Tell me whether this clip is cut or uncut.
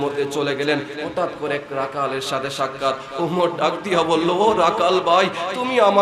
uncut